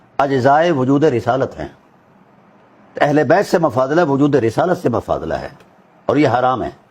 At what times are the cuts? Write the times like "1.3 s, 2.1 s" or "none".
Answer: none

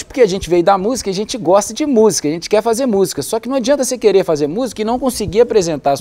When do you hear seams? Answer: none

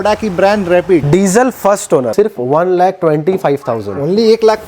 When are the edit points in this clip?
2.1 s

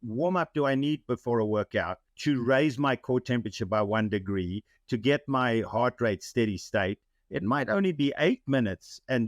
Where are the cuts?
2.0 s

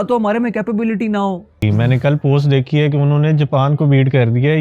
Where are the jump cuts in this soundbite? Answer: 1.6 s

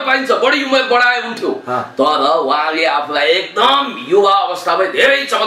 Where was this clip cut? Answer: none

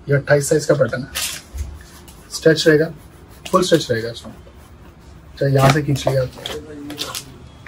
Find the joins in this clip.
none

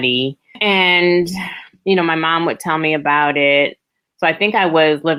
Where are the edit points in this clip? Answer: none

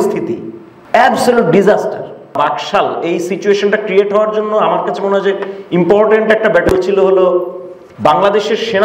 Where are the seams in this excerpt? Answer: 2.4 s

